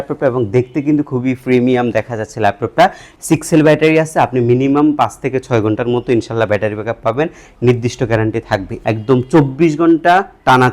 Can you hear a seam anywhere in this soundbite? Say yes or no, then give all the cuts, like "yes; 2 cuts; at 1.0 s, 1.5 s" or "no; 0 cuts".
yes; 2 cuts; at 3.0 s, 8.7 s